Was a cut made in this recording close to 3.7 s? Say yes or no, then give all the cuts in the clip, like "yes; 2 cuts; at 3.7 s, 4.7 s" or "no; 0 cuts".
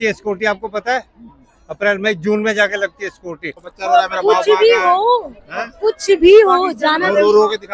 yes; 1 cut; at 3.7 s